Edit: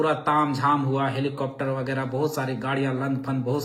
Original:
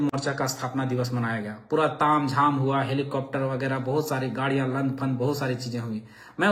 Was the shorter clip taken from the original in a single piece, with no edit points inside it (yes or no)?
yes